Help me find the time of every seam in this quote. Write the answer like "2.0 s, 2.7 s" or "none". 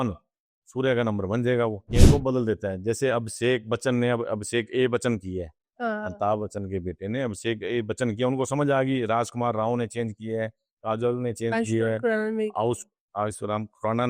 1.8 s